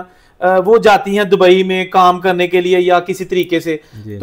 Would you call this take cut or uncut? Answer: uncut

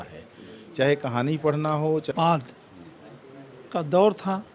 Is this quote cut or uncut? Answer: cut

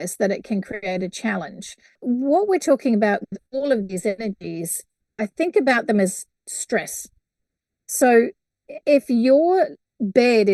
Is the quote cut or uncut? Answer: cut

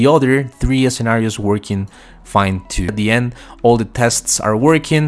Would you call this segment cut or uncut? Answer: cut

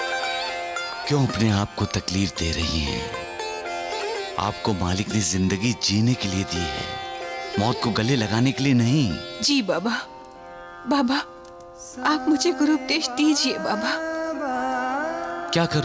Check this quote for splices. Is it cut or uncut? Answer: uncut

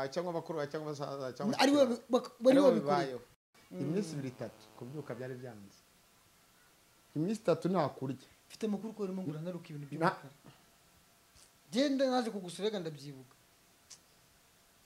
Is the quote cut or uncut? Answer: cut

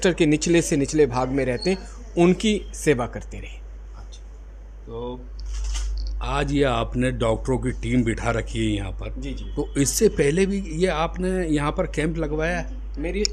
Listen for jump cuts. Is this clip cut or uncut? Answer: uncut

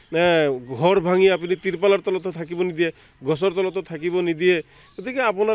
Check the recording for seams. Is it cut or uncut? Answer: uncut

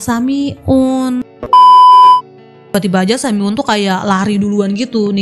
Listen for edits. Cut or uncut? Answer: cut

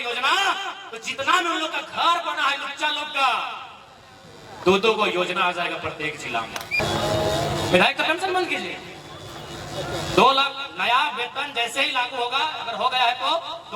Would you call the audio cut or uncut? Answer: cut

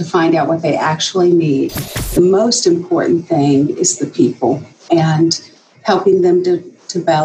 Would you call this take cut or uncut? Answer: cut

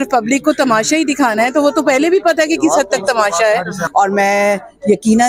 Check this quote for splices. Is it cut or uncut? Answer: cut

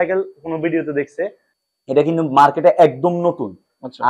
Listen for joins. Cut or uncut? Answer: cut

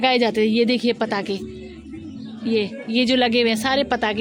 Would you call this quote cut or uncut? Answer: uncut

